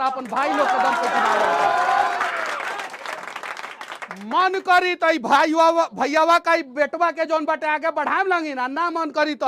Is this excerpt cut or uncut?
uncut